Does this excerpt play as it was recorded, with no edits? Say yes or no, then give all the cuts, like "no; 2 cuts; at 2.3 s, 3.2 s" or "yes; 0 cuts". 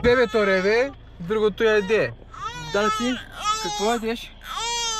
yes; 0 cuts